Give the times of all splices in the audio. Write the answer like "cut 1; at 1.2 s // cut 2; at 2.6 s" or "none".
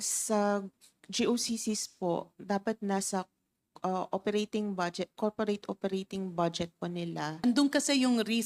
cut 1; at 7.4 s